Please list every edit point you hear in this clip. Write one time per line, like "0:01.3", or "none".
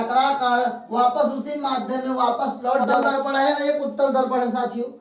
0:02.9

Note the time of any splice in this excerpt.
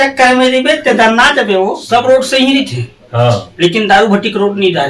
0:01.8

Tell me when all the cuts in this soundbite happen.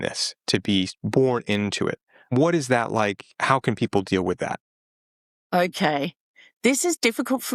none

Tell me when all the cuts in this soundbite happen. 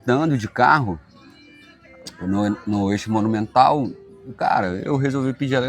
none

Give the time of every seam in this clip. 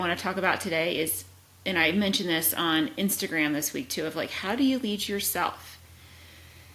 none

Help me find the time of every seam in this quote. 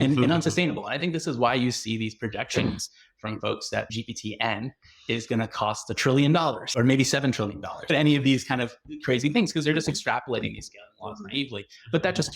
0:03.9
0:06.6
0:07.9

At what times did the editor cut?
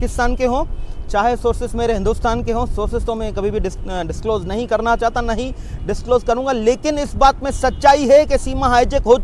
none

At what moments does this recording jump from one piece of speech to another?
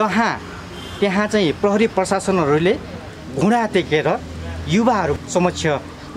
0:03.2
0:05.2

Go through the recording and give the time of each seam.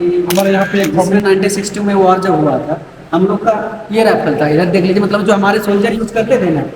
0:01.2

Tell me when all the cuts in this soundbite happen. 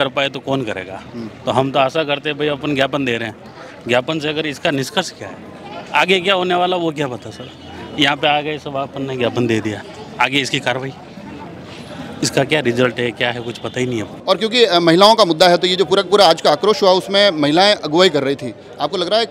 none

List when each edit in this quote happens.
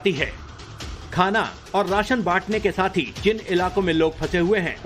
0:03.1

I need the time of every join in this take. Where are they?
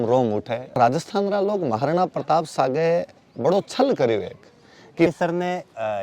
0:00.8
0:05.1

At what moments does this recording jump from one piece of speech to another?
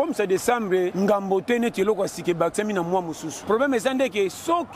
0:00.9
0:03.3

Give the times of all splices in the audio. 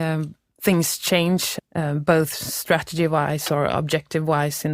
0:01.5

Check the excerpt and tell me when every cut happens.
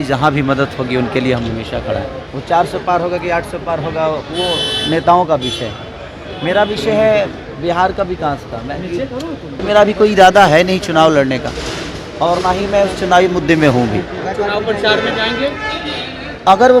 0:02.2
0:09.6
0:14.2

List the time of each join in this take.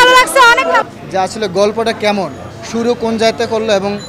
none

